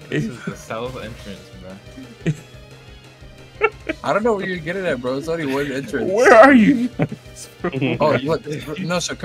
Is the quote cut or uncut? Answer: uncut